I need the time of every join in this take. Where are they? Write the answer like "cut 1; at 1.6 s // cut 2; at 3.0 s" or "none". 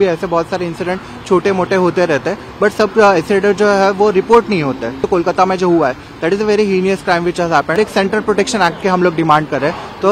cut 1; at 5.0 s // cut 2; at 7.8 s